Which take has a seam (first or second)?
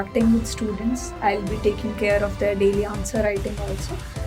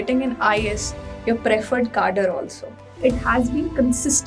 second